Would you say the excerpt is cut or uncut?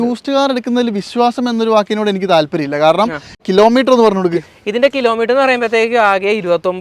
cut